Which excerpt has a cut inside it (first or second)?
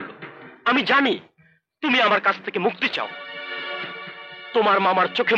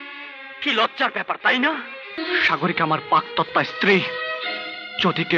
second